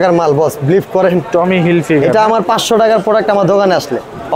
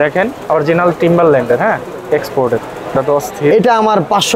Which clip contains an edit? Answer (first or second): second